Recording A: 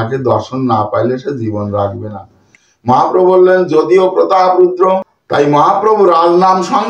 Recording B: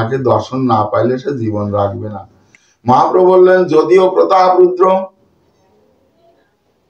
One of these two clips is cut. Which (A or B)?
A